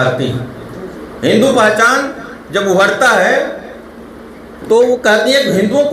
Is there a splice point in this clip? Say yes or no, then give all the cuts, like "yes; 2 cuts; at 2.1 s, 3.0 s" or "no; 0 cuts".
no; 0 cuts